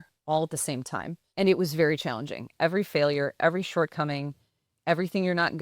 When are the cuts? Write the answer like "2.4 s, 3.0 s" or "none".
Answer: 1.2 s, 2.5 s